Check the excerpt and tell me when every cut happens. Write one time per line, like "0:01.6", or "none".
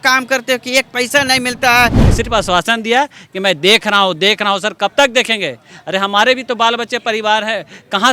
0:02.0

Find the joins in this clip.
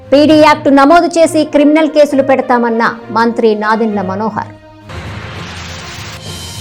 none

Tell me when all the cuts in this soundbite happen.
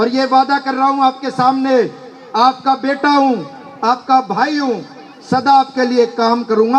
none

